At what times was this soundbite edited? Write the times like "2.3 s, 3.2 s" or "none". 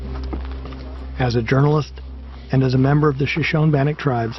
1.5 s